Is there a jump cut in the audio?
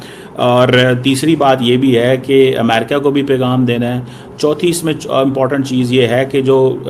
no; 0 cuts

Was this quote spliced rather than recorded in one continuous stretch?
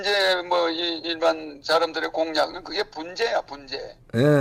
no; 0 cuts

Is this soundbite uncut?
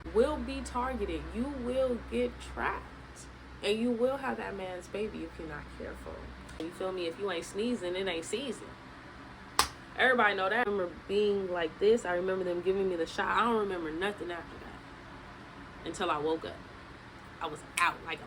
no; 2 cuts; at 6.6 s, 10.7 s

